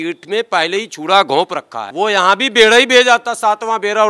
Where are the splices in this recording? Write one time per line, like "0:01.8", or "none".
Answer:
0:01.8